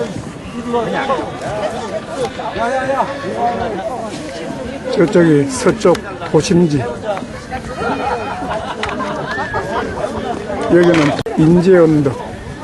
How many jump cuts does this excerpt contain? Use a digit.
1